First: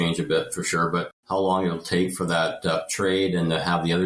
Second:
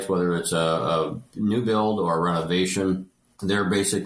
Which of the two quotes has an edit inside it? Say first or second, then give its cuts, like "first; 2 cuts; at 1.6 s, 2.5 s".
first; 1 cut; at 1.2 s